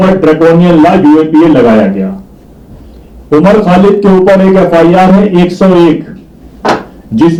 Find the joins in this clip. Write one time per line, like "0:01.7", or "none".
none